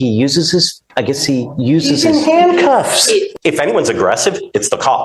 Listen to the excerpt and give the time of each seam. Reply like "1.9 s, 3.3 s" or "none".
3.3 s